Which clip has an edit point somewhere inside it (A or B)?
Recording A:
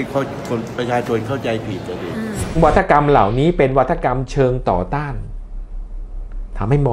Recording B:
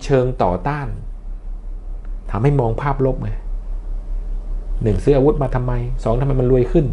A